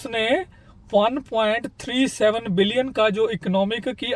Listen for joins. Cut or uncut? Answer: uncut